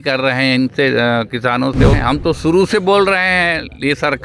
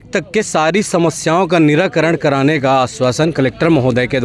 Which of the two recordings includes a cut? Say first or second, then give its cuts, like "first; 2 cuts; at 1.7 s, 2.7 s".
first; 1 cut; at 2.0 s